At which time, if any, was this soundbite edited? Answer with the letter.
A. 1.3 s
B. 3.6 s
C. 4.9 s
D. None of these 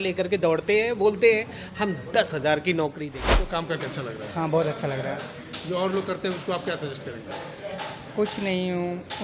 B